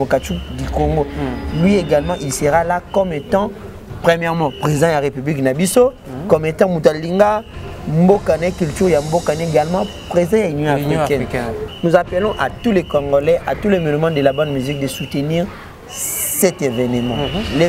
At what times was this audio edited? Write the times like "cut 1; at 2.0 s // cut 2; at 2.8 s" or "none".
cut 1; at 11.6 s